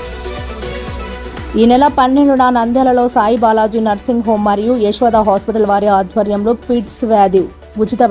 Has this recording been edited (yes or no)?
yes